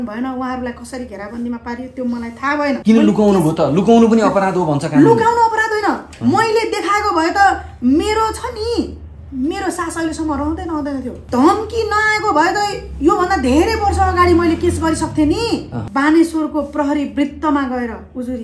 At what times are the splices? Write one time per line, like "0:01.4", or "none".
0:02.8
0:11.2
0:15.8

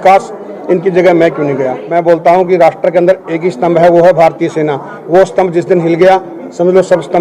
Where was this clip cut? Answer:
0:01.8

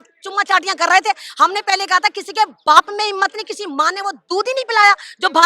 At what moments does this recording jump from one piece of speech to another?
none

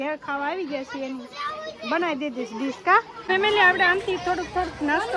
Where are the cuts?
0:03.1

